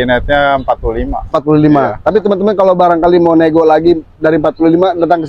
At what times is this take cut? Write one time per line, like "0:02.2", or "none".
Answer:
none